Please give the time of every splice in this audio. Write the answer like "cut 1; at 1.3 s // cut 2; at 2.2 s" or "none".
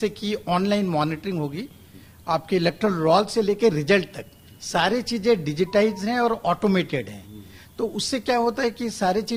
none